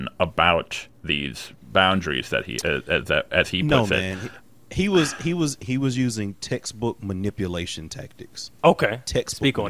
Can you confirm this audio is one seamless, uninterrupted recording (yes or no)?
yes